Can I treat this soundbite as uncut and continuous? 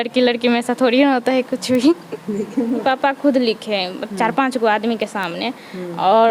no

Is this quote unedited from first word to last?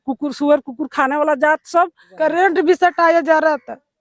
no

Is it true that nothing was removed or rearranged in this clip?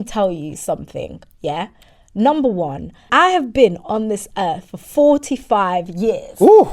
no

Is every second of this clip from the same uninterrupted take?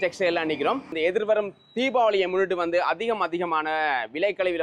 no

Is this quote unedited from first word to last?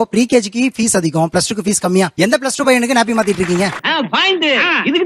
no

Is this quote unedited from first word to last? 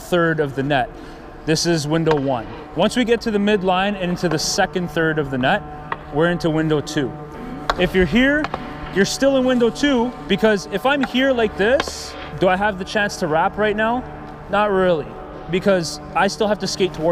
no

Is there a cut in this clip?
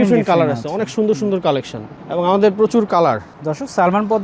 no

